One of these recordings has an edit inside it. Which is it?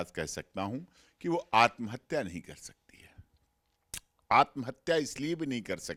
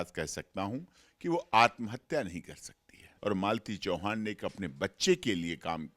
second; 1 cut; at 3.1 s

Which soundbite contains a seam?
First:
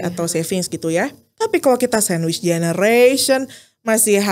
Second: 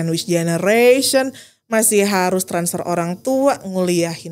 first; 1 cut; at 1.2 s

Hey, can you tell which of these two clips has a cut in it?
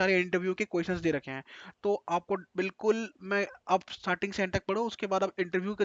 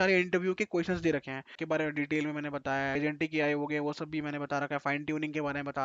second; 2 cuts; at 1.6 s, 2.9 s

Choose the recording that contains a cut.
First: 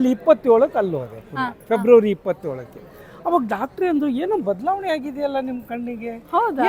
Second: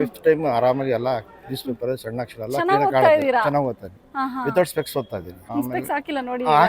second; 1 cut; at 5.3 s

